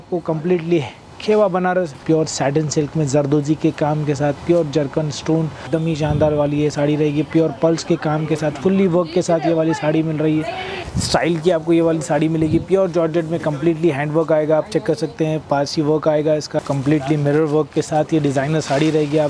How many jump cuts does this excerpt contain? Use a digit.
4